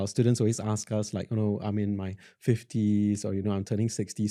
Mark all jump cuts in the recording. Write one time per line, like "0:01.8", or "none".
none